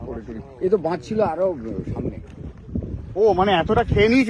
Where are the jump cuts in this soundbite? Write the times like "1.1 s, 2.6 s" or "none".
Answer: none